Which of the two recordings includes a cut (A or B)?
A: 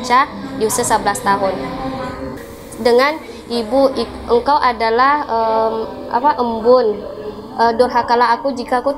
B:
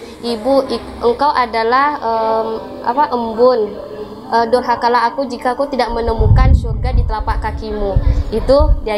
A